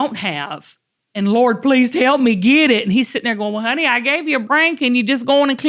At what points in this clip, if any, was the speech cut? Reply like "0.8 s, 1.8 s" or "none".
none